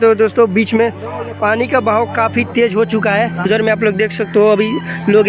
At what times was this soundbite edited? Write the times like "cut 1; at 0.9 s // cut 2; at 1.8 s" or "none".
cut 1; at 3.5 s